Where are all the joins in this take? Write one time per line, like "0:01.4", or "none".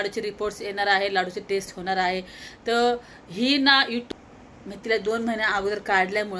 0:04.1